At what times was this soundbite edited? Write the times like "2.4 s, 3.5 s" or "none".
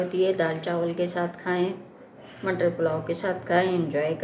none